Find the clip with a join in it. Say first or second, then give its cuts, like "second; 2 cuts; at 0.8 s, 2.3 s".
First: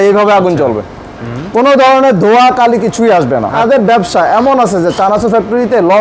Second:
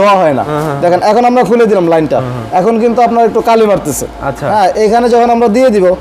first; 1 cut; at 3.6 s